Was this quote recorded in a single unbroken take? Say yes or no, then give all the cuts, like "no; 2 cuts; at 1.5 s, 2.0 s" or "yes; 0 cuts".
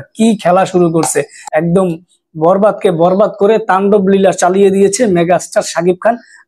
no; 1 cut; at 1.5 s